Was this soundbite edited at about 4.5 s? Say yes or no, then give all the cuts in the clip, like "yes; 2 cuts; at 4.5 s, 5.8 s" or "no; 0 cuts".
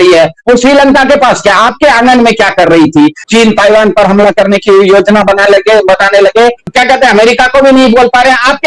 no; 2 cuts; at 3.2 s, 6.7 s